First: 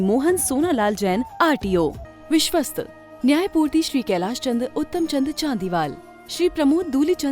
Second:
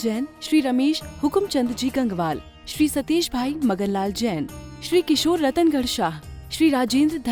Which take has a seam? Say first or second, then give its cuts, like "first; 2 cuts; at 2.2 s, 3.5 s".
first; 1 cut; at 2.1 s